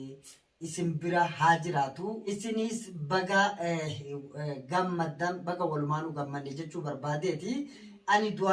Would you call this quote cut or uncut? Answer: cut